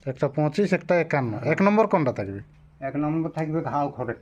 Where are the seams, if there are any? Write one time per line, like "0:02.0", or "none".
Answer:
none